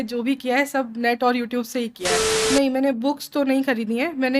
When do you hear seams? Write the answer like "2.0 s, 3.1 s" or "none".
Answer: 2.5 s